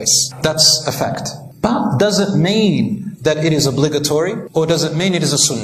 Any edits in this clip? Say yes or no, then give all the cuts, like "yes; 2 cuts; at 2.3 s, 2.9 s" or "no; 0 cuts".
yes; 1 cut; at 4.4 s